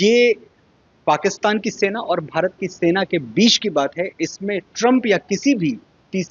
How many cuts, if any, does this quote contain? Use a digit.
0